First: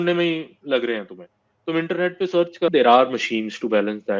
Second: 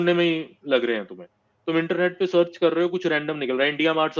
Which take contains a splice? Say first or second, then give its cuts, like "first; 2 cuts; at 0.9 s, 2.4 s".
first; 1 cut; at 2.7 s